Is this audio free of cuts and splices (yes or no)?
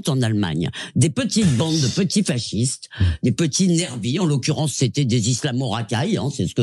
yes